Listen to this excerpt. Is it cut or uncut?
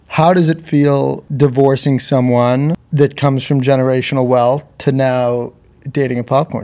cut